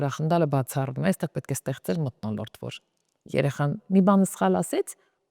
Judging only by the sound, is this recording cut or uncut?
uncut